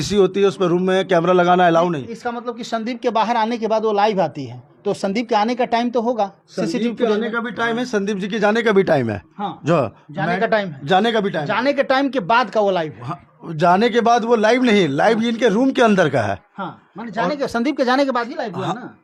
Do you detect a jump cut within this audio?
no; 0 cuts

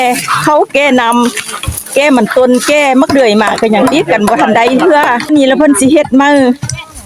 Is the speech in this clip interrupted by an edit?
yes; 1 cut; at 5.3 s

